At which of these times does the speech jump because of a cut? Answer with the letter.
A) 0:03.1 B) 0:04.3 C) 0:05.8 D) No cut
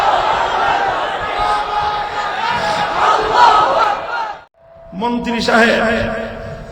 B